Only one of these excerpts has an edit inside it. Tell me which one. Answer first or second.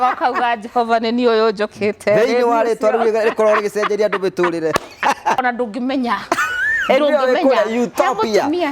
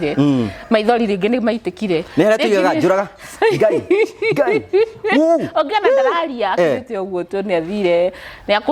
first